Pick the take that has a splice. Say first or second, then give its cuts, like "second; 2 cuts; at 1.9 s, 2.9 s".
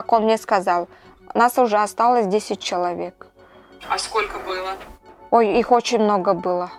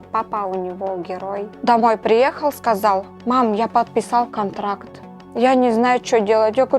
second; 2 cuts; at 1.6 s, 5.2 s